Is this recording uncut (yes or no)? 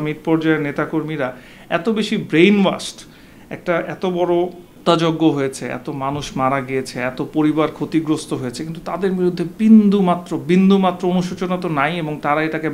no